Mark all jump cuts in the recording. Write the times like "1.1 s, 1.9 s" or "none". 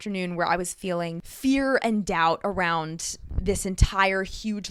none